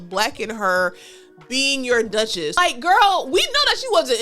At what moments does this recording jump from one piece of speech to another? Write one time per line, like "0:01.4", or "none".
0:02.6